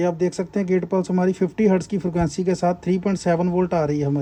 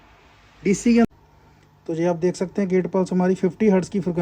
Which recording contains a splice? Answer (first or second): second